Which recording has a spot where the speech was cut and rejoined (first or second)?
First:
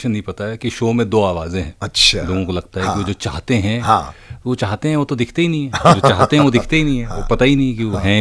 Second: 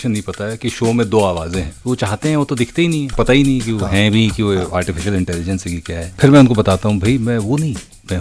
second